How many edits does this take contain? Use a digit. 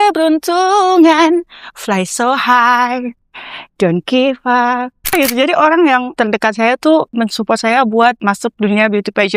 4